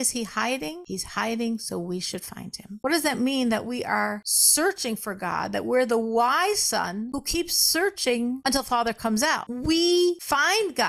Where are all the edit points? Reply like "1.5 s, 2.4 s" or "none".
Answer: 2.8 s, 9.5 s

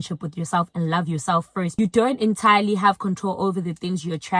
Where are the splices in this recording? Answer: 1.7 s

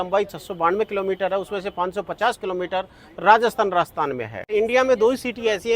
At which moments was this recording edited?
4.5 s

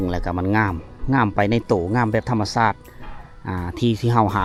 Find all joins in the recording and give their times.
none

